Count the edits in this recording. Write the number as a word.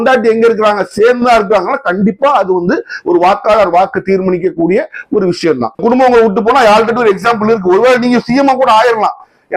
one